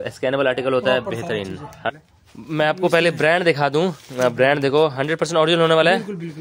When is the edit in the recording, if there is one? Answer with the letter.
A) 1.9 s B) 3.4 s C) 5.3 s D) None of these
A